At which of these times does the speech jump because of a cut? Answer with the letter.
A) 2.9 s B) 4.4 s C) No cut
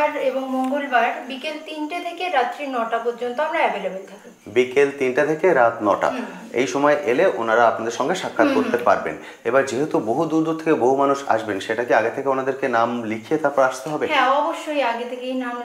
C